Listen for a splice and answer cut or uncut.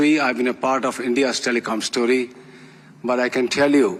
uncut